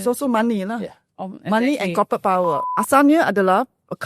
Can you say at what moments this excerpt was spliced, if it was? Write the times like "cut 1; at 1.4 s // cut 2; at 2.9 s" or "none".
cut 1; at 2.6 s